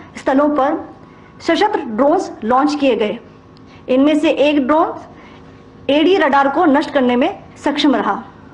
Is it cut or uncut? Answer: uncut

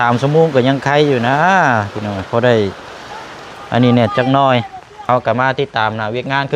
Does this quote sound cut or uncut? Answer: cut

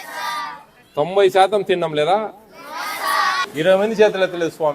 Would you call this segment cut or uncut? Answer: cut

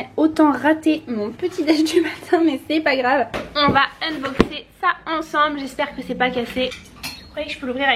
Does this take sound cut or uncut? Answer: cut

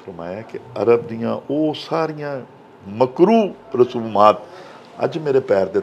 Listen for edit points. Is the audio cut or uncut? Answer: uncut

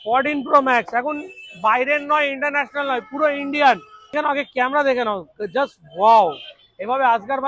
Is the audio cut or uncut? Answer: cut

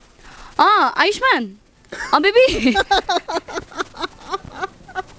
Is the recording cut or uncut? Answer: uncut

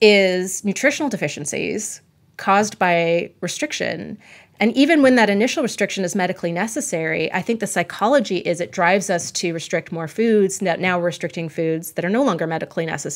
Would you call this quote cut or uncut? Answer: uncut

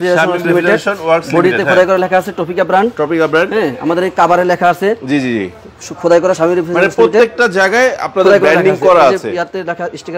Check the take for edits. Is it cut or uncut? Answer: uncut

